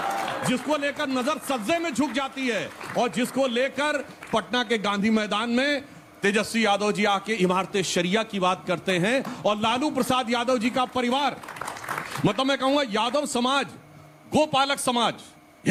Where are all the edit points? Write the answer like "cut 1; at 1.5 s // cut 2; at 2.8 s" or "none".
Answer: none